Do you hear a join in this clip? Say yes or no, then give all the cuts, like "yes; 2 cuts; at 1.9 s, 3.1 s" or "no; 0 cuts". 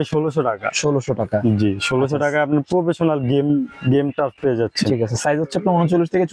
no; 0 cuts